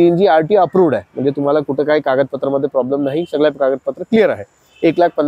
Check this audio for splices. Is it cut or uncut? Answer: uncut